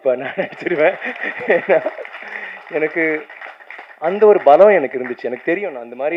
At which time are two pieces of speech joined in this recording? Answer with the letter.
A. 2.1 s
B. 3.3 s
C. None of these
C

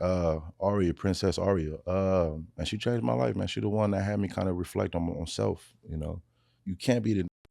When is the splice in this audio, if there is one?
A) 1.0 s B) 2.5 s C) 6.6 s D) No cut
C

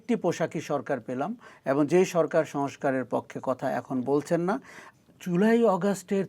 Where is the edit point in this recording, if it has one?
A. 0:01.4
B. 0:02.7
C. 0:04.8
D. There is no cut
C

